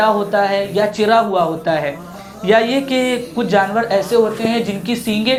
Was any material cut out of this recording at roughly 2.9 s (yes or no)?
no